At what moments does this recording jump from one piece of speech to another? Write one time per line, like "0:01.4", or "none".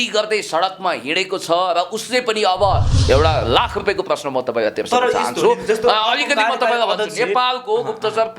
0:02.9